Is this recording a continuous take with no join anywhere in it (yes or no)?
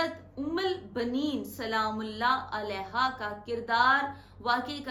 yes